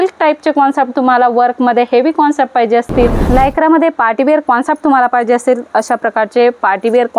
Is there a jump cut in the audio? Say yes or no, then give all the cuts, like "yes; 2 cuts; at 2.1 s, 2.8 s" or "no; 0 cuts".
yes; 1 cut; at 3.2 s